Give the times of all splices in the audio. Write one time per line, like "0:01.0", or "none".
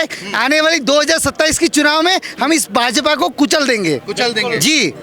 none